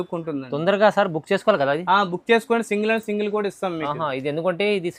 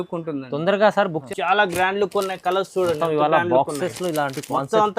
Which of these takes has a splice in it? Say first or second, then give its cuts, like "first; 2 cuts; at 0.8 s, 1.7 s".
second; 1 cut; at 1.2 s